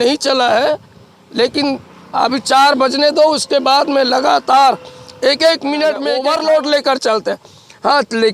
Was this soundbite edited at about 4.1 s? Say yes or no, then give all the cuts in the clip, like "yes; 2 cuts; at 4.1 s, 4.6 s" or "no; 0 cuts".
no; 1 cut; at 6.1 s